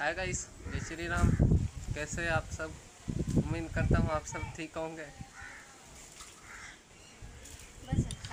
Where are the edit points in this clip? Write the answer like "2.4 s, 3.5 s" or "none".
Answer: none